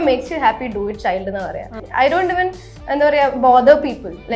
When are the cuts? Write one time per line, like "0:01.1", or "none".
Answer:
0:01.8